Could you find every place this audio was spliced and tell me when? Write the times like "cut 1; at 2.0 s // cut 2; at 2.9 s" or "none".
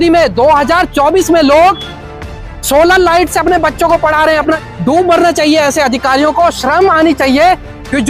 cut 1; at 4.6 s

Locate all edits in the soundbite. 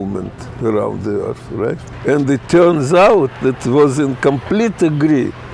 cut 1; at 1.9 s

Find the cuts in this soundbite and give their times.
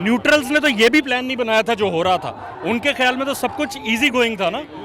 none

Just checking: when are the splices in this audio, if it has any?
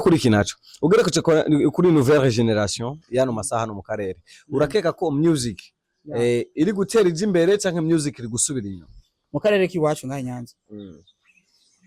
none

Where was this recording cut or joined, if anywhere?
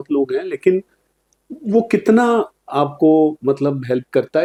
none

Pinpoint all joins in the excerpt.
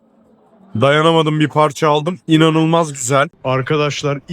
cut 1; at 3.4 s

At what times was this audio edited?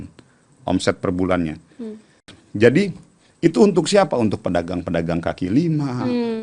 cut 1; at 2.4 s

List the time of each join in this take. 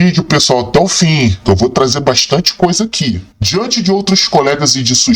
cut 1; at 3.3 s

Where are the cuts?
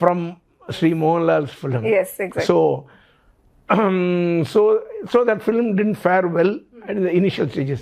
none

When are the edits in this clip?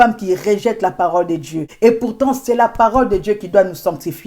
cut 1; at 1.7 s

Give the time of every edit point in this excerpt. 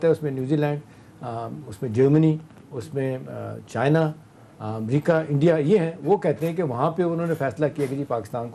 none

